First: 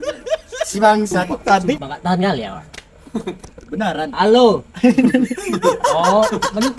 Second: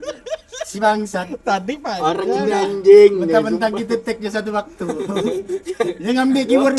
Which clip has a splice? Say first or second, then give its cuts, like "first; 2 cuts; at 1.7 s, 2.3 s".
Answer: first; 2 cuts; at 1.8 s, 3.4 s